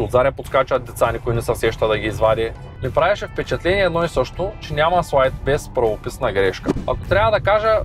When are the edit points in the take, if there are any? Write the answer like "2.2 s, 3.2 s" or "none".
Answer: 2.6 s, 6.7 s